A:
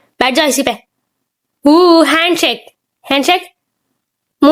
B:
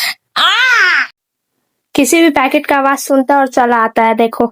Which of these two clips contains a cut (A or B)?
B